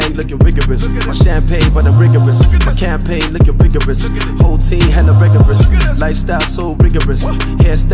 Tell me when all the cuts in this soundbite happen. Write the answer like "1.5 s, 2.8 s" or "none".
none